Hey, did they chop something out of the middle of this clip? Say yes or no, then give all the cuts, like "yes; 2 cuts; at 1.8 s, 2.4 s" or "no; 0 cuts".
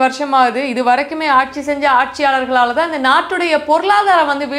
no; 0 cuts